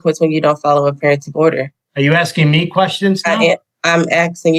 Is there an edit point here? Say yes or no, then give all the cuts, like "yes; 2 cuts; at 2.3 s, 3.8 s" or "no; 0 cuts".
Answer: yes; 2 cuts; at 1.8 s, 3.7 s